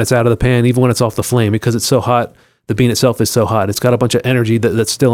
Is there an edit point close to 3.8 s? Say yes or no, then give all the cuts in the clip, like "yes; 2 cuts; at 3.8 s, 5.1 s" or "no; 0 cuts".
yes; 1 cut; at 3.8 s